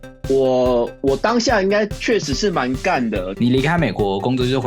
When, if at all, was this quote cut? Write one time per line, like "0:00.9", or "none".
0:03.3